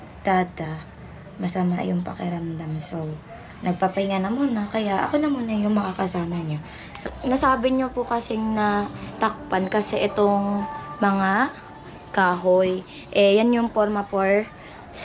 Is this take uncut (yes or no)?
no